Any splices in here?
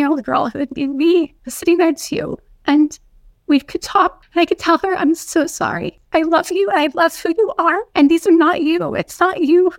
yes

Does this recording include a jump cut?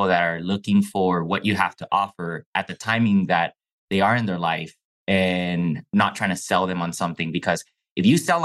no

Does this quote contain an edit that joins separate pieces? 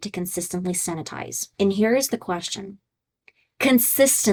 no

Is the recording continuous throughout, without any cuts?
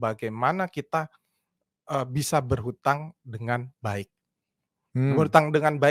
yes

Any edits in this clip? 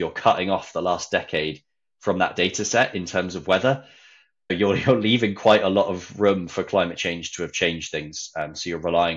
no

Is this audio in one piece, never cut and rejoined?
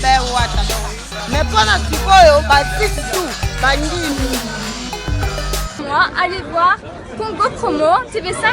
no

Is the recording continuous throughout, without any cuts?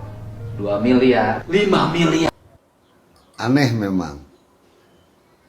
no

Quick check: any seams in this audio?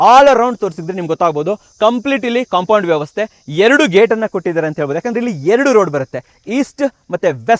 no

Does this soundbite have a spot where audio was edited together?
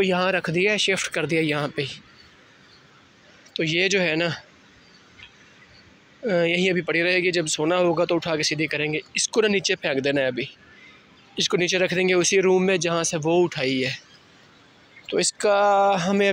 no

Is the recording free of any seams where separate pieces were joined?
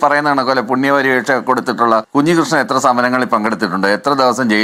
yes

